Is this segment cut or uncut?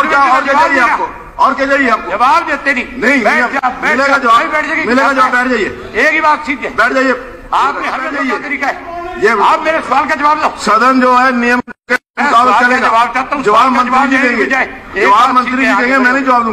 cut